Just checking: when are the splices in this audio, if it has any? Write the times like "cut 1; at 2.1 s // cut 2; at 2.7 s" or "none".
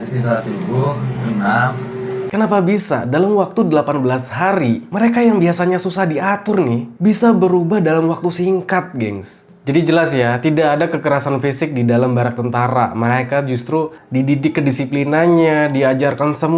cut 1; at 2.3 s // cut 2; at 9.4 s